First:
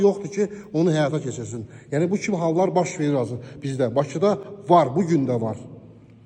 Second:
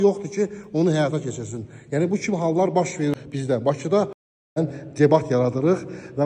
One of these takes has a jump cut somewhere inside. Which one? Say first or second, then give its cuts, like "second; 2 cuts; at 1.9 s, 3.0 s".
second; 2 cuts; at 3.1 s, 4.3 s